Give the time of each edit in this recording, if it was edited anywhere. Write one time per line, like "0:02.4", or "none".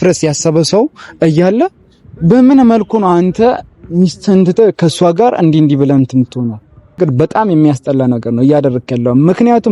0:07.0